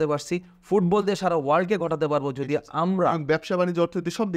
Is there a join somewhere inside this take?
no; 0 cuts

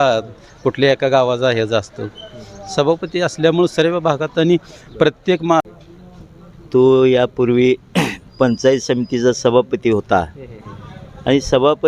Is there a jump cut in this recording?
yes; 1 cut; at 5.6 s

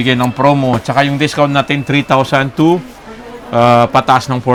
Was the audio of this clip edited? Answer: no; 0 cuts

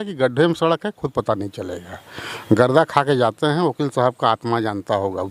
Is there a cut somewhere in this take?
no; 0 cuts

